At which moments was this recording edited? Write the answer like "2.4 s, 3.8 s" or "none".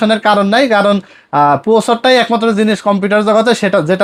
none